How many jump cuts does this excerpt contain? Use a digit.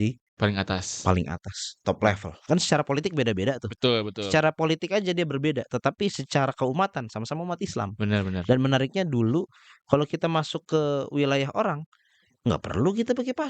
1